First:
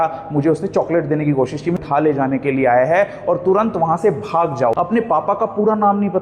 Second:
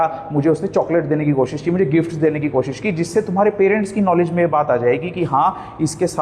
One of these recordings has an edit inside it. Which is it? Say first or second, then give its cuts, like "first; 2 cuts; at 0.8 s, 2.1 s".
first; 2 cuts; at 1.8 s, 4.7 s